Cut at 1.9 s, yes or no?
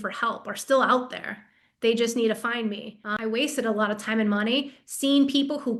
no